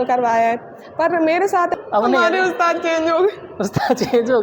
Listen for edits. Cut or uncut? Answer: cut